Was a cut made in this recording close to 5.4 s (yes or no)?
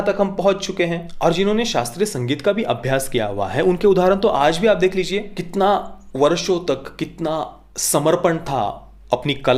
yes